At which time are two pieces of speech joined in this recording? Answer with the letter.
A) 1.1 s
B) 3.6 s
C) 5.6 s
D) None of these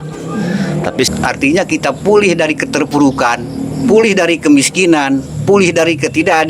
A